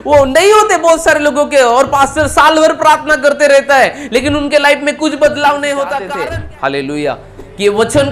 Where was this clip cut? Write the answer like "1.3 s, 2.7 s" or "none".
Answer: 6.0 s